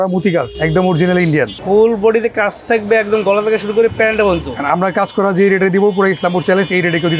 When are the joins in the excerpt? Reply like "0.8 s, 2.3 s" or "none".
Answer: none